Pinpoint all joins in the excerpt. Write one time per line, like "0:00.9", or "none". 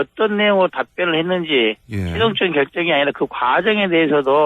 0:01.1